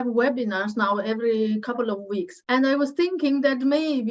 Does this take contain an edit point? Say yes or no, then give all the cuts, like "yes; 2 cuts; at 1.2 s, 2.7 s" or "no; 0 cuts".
yes; 1 cut; at 2.4 s